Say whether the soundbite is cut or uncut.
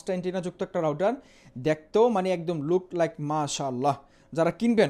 uncut